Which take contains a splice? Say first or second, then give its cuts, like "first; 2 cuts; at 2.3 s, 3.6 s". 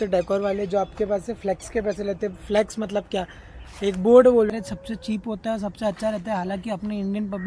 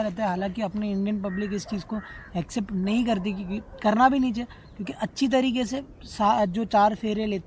first; 1 cut; at 4.5 s